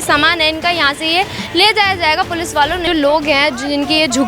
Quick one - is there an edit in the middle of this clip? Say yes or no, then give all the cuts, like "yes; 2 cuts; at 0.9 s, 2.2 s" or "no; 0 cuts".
yes; 1 cut; at 2.8 s